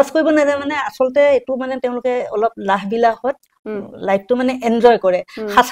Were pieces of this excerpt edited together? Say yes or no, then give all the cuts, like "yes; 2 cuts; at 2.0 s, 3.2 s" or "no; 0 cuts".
no; 0 cuts